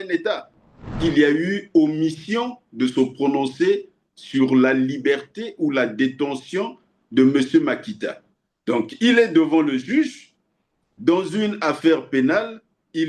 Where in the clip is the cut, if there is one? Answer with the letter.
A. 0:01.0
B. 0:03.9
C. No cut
A